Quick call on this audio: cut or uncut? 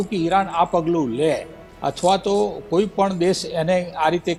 uncut